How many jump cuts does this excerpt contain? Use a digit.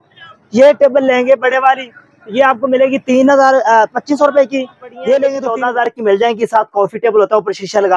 1